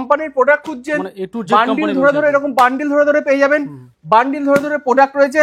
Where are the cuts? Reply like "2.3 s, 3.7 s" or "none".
none